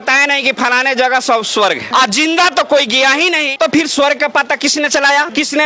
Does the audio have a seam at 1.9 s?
yes; 1 cut; at 1.9 s

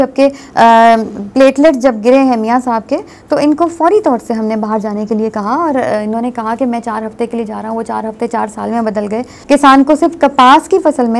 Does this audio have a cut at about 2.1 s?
no; 1 cut; at 9.3 s

